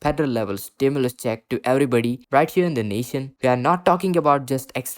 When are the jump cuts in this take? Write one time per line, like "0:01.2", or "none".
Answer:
0:03.3

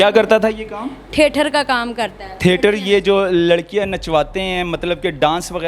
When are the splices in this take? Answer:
none

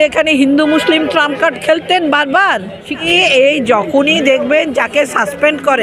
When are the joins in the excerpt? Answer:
0:03.1

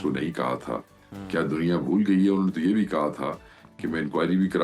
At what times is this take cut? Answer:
none

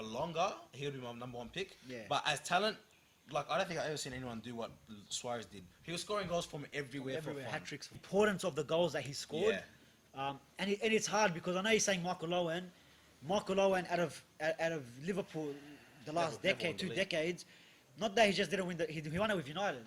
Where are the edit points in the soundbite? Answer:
0:08.0

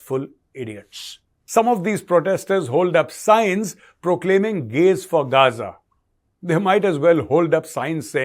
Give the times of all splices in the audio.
0:01.4

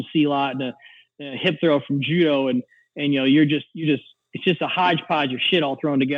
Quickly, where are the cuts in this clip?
none

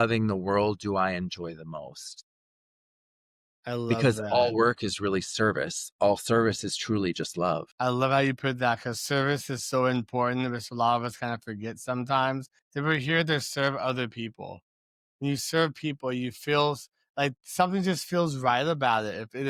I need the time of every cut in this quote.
none

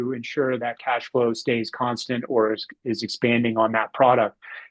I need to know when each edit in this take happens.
none

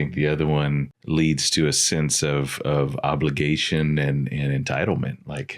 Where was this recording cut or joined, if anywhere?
0:00.9

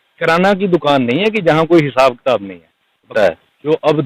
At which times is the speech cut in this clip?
0:03.1

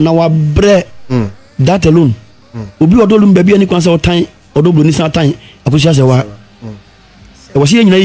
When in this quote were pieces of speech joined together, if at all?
none

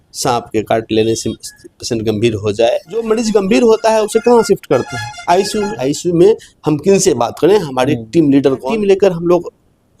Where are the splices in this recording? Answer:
0:03.0
0:05.8
0:08.6

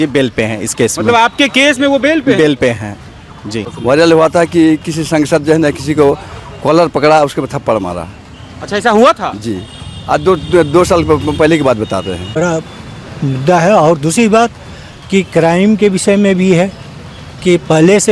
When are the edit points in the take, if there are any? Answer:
0:03.7
0:12.4

